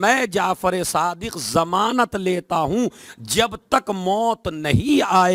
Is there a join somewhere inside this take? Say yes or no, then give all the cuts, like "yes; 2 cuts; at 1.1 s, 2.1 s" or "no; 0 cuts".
no; 0 cuts